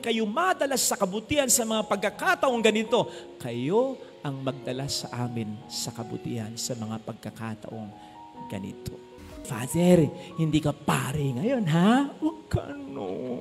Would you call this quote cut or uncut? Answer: cut